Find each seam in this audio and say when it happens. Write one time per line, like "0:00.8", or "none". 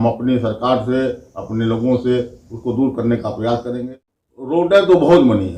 0:03.8